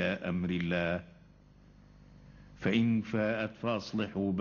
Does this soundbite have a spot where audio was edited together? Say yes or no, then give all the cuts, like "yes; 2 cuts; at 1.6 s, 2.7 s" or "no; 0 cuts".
yes; 1 cut; at 1.1 s